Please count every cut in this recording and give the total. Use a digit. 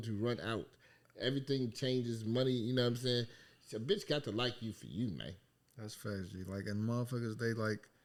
0